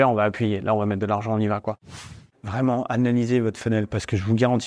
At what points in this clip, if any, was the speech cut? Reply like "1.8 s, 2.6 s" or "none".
1.9 s